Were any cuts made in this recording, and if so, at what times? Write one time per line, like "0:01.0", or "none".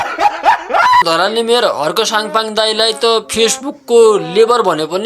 0:01.0